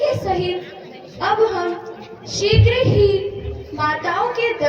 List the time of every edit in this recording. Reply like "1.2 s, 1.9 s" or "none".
none